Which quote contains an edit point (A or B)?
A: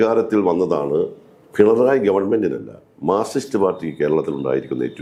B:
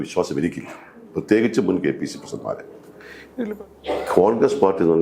B